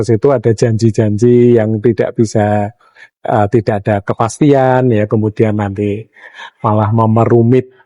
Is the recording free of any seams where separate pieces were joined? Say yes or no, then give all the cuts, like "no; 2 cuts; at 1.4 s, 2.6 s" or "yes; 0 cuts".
yes; 0 cuts